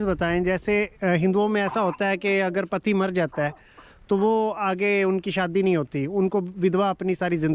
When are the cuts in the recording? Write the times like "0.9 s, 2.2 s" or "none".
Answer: 0.9 s